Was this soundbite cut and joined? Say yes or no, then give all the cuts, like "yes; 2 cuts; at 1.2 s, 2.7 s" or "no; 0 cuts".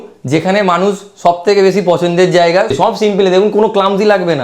yes; 1 cut; at 2.7 s